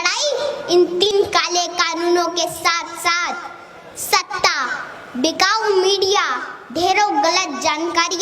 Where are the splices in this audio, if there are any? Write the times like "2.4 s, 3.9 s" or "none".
1.1 s